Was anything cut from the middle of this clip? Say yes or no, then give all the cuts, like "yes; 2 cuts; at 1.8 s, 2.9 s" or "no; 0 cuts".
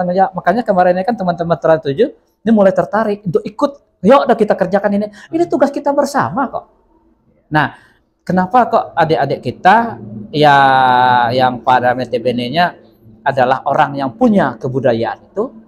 no; 0 cuts